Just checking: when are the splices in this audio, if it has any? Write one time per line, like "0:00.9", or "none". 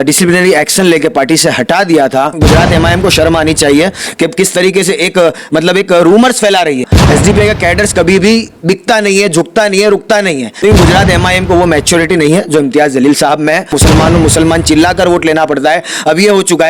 0:02.4
0:06.9
0:10.5
0:13.8